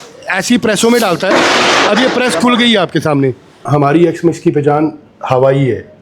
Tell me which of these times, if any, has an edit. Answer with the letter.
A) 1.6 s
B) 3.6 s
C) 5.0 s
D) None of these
B